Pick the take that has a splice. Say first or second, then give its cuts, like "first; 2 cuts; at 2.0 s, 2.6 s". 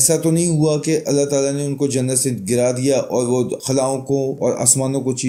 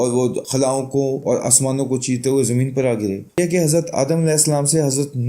second; 1 cut; at 3.3 s